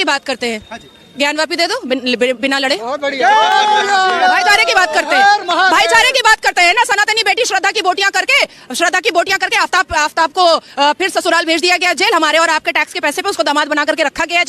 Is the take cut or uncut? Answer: uncut